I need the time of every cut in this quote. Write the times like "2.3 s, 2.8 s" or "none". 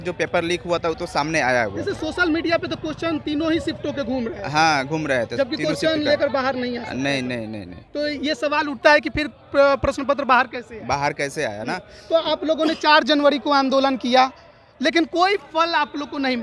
none